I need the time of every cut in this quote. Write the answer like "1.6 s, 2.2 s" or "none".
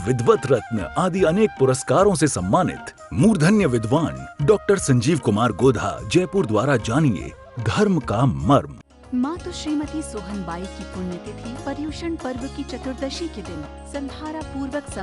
8.9 s